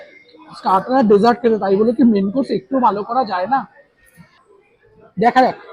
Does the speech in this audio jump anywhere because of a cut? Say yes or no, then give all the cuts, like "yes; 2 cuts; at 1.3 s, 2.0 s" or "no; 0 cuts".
yes; 1 cut; at 4.3 s